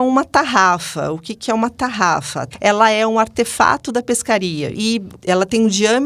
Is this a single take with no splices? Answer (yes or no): no